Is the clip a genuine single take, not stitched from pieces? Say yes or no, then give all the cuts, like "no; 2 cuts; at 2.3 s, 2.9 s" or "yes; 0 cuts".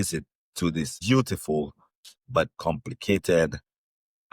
no; 1 cut; at 0.9 s